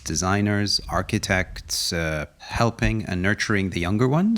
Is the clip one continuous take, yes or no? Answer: no